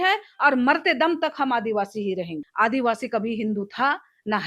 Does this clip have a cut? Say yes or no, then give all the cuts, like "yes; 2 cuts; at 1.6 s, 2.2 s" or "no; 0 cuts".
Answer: yes; 1 cut; at 2.4 s